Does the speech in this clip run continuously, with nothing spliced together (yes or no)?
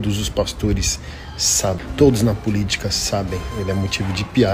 no